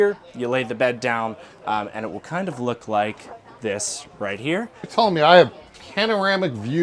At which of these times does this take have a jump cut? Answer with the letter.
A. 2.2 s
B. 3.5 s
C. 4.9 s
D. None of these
C